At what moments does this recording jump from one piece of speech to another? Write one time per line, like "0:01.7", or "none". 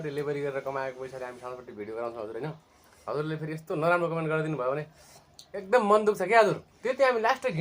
0:06.7

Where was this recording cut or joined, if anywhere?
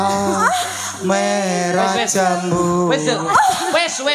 none

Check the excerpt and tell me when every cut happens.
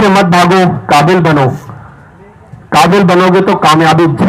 none

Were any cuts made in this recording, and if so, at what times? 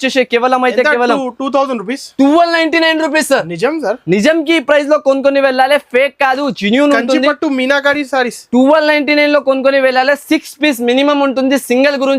none

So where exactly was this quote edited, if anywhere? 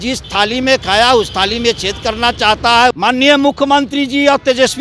0:03.0

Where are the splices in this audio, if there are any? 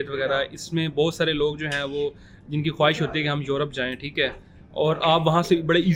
none

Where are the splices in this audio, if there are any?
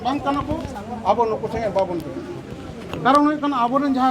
none

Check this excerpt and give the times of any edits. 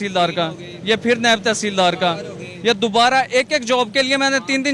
none

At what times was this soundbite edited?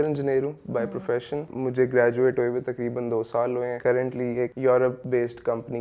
0:01.5
0:04.2
0:05.0

